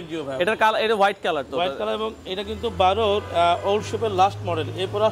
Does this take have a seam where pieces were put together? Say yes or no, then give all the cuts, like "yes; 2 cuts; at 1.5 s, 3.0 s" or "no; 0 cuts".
no; 0 cuts